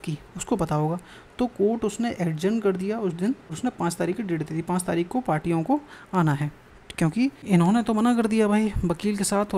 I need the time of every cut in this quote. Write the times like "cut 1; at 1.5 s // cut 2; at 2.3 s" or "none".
cut 1; at 3.5 s // cut 2; at 7.4 s